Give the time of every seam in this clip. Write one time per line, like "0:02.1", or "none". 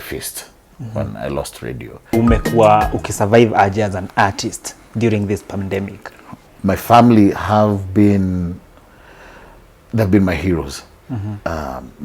0:02.1
0:06.4